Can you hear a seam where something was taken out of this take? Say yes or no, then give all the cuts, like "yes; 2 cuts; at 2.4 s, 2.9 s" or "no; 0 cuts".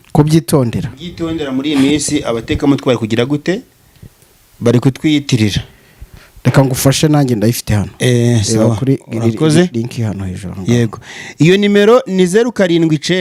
no; 0 cuts